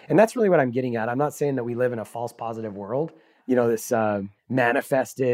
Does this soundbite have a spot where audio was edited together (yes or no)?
yes